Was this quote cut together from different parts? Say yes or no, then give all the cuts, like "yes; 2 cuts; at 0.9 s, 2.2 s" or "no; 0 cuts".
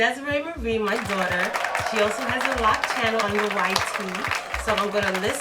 yes; 1 cut; at 3.2 s